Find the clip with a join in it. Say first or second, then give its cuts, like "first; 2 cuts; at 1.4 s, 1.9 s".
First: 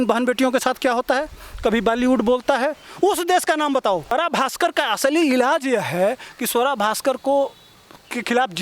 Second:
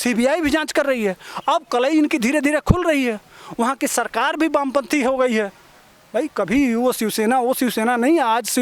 first; 1 cut; at 4.1 s